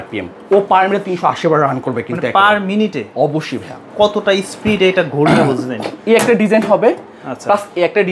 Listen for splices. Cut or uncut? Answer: uncut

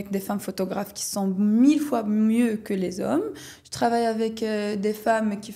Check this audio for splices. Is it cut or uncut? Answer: uncut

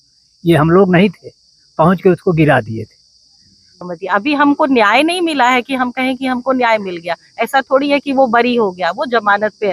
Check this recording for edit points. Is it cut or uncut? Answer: cut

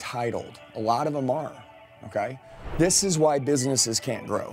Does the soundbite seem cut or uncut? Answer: cut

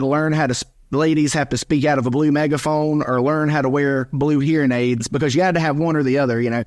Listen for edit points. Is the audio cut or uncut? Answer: uncut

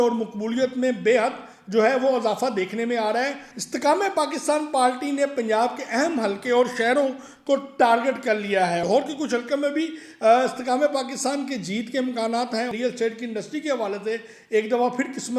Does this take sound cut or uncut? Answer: cut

